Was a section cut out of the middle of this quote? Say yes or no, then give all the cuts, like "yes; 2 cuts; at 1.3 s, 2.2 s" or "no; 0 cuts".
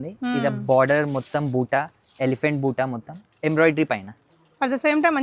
no; 0 cuts